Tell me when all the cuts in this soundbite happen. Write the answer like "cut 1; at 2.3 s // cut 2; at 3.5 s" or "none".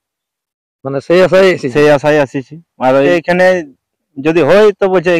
cut 1; at 3.1 s